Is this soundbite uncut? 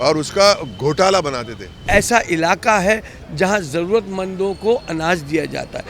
no; 1 cut; at 1.8 s

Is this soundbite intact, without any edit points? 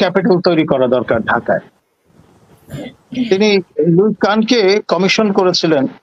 yes; 0 cuts

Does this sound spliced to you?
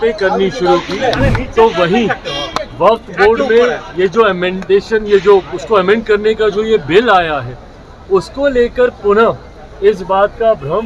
no; 0 cuts

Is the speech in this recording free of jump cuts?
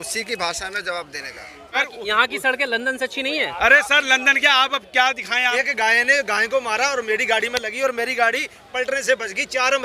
no; 2 cuts; at 1.8 s, 5.5 s

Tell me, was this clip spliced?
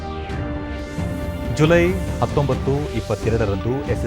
no; 0 cuts

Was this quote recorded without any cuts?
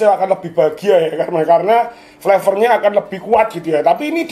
yes; 0 cuts

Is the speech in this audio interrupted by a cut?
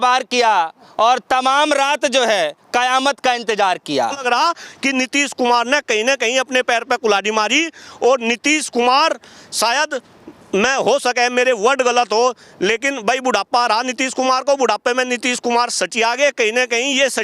yes; 1 cut; at 4.2 s

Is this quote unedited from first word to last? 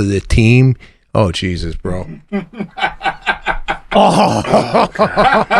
no; 1 cut; at 2.7 s

